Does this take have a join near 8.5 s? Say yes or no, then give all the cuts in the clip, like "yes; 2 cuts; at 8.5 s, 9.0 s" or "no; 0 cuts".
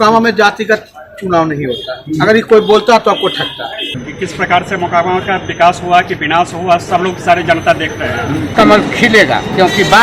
yes; 2 cuts; at 3.8 s, 8.5 s